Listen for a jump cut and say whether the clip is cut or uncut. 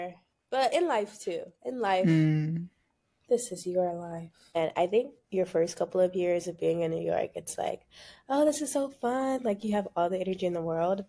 cut